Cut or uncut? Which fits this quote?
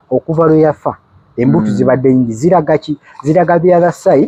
uncut